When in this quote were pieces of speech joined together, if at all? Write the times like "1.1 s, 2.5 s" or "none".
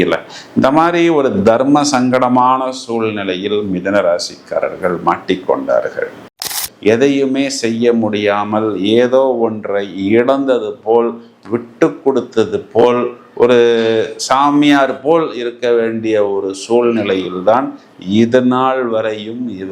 6.7 s